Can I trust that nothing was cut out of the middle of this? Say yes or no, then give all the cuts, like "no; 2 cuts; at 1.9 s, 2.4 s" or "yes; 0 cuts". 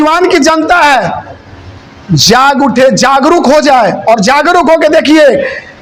yes; 0 cuts